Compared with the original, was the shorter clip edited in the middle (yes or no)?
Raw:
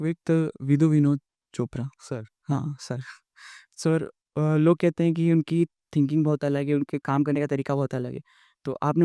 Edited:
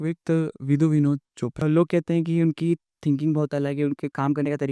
yes